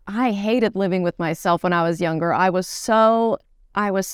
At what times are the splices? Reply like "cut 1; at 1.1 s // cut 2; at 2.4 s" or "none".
none